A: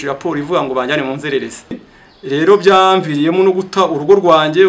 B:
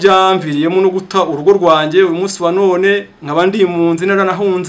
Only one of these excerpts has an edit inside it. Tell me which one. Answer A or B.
A